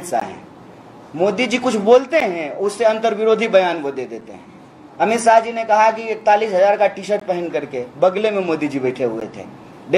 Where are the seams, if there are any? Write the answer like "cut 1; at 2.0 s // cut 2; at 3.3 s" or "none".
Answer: none